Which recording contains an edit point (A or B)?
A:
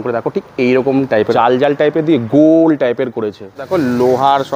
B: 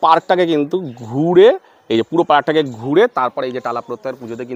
A